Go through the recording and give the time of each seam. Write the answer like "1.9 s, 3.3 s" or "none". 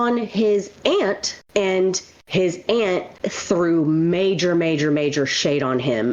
none